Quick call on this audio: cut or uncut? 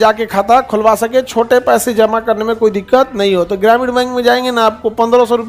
uncut